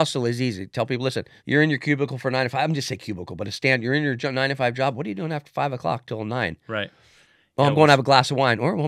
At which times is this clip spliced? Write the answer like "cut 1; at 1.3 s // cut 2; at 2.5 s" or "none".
cut 1; at 1.3 s